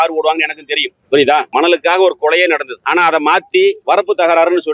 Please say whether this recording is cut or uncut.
cut